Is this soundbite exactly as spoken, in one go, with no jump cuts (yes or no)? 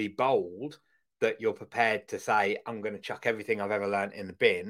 yes